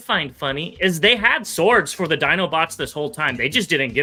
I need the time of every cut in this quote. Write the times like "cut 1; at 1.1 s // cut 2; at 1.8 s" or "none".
none